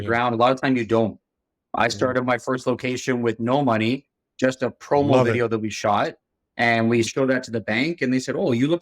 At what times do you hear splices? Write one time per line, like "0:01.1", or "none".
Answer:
0:07.1